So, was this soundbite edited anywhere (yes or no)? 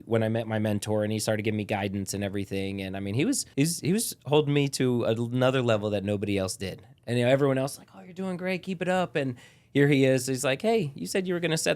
yes